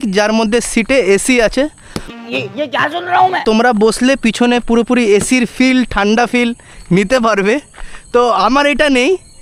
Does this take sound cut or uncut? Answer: uncut